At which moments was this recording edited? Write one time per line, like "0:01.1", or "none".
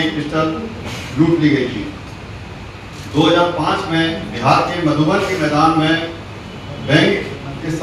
none